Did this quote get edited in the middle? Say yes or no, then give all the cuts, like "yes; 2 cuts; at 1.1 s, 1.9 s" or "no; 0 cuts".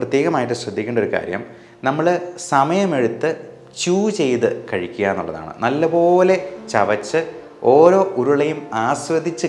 no; 0 cuts